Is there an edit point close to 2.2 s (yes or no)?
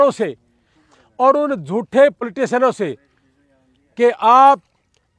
yes